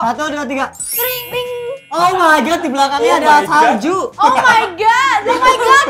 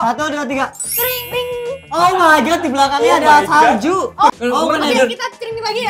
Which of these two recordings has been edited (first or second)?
second